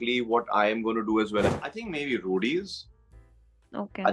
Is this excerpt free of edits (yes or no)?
no